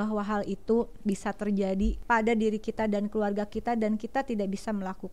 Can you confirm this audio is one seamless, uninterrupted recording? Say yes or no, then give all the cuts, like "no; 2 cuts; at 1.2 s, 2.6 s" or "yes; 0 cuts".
no; 1 cut; at 2.0 s